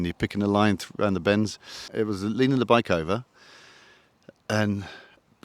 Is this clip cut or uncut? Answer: cut